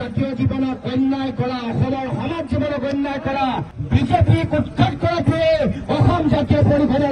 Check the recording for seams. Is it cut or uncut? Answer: uncut